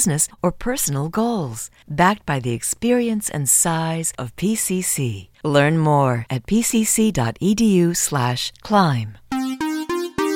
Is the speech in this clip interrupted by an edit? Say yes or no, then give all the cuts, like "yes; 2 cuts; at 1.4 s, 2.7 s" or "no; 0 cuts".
yes; 1 cut; at 9.1 s